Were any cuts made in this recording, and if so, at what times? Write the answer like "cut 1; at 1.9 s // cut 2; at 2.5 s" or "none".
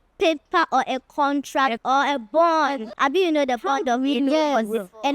cut 1; at 1.8 s // cut 2; at 2.9 s